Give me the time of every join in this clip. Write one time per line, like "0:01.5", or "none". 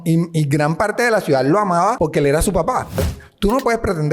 0:02.0
0:03.2